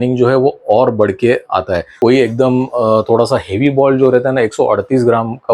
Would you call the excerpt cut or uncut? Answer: cut